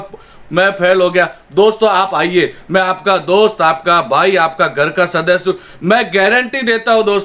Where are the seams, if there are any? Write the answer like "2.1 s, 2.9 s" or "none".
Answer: none